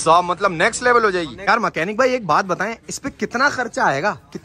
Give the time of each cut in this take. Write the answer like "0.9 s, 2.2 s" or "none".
1.5 s

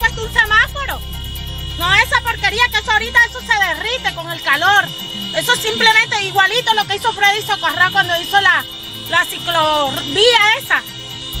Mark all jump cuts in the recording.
none

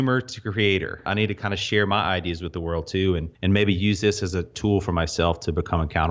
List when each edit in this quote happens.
1.1 s, 3.3 s, 4.5 s

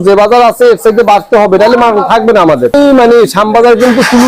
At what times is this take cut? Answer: 2.7 s

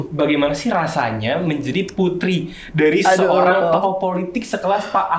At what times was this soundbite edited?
none

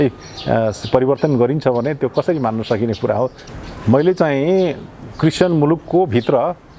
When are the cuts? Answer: 3.4 s

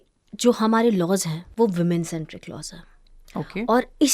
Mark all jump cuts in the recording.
1.4 s

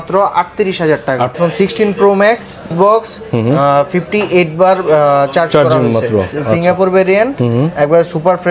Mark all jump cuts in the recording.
1.4 s, 2.7 s

